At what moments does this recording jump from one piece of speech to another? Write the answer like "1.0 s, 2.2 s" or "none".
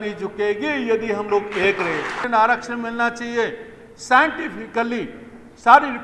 2.3 s